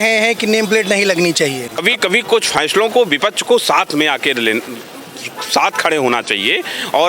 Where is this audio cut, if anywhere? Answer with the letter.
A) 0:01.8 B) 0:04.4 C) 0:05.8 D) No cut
A